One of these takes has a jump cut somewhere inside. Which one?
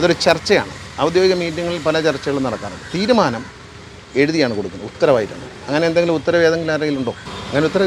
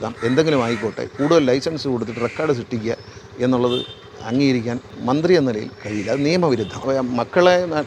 second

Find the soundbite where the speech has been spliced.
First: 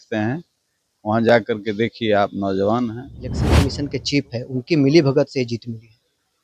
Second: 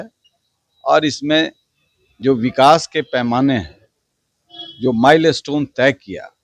first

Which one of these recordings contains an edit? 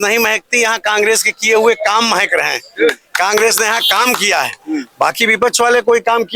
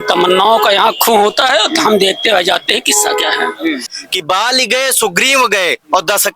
second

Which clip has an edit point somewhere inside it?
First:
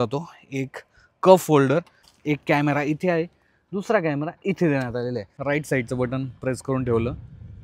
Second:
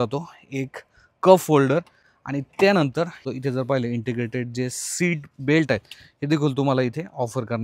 first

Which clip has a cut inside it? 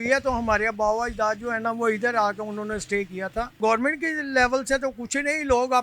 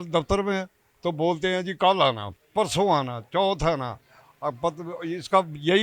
first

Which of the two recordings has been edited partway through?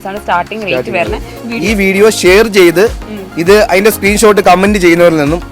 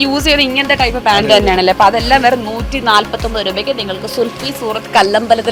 first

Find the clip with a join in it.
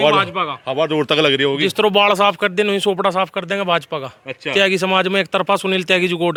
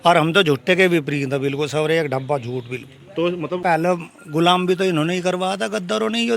second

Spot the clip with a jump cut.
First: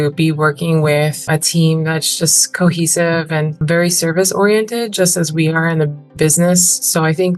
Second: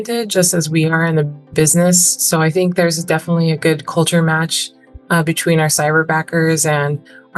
first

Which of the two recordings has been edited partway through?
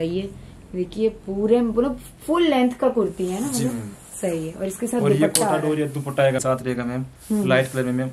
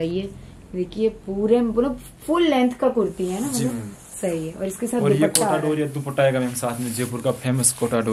first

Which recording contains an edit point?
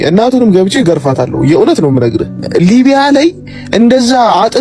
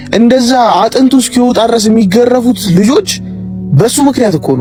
first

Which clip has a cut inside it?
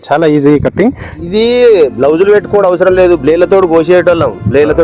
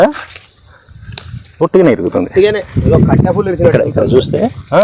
first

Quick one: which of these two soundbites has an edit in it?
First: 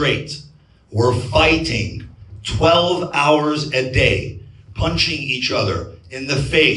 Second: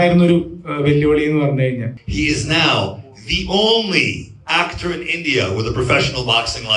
second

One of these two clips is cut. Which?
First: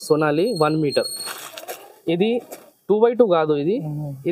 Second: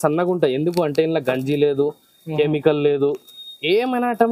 first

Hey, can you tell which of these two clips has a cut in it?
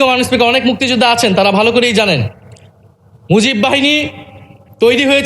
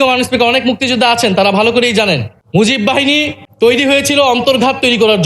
second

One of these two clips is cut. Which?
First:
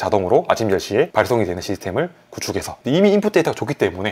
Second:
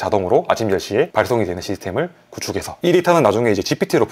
first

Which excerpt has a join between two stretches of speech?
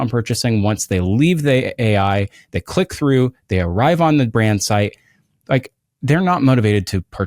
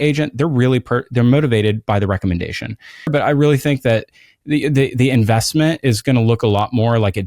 second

